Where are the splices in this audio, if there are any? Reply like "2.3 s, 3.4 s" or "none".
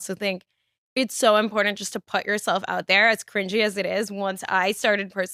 none